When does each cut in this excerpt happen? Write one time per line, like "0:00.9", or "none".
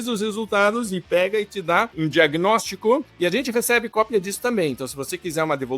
0:01.9
0:03.1